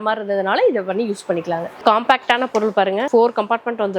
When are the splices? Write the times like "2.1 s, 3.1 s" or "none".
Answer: 1.8 s, 3.0 s

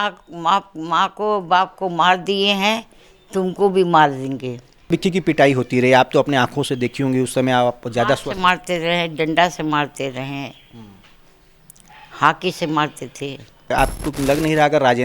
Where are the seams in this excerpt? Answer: 4.9 s, 13.7 s

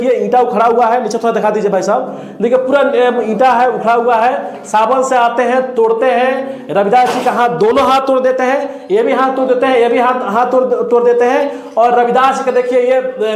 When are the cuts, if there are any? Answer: none

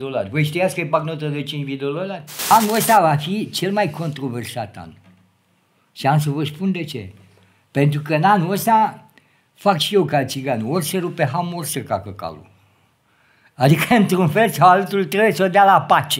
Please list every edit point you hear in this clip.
2.5 s

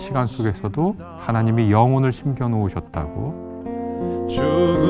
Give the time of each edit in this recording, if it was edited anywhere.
1.1 s, 3.5 s

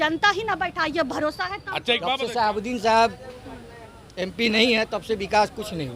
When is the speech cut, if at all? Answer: 2.0 s

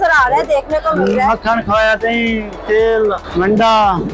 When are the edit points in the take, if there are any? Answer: 1.9 s, 3.2 s

